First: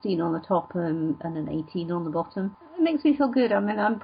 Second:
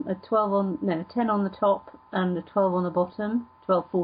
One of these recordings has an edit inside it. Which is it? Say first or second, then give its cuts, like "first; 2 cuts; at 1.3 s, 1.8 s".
first; 1 cut; at 2.5 s